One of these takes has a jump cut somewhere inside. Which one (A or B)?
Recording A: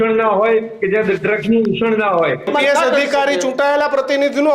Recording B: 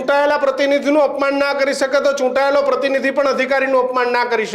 A